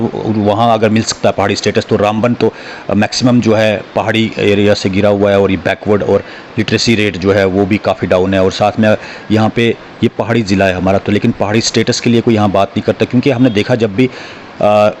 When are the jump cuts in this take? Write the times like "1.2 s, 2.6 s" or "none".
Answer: none